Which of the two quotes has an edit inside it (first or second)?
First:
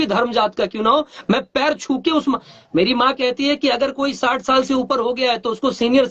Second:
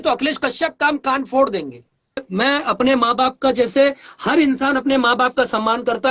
second